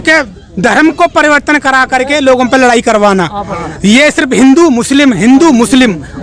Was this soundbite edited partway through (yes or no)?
no